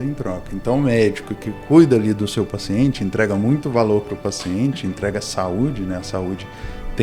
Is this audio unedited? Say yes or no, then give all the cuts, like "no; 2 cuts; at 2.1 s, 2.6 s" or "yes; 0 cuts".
yes; 0 cuts